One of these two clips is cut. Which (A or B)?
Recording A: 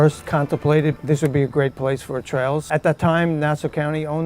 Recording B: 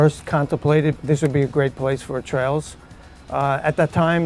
A